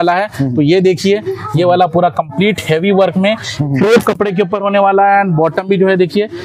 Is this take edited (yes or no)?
no